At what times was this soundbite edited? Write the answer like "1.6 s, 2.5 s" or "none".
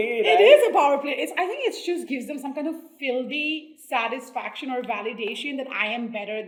none